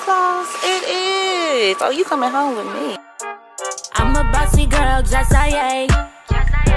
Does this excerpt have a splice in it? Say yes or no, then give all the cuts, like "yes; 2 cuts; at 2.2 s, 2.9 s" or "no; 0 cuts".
yes; 1 cut; at 3.0 s